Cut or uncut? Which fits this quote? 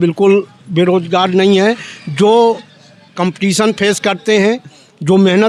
uncut